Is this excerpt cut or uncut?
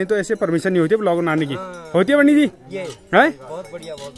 uncut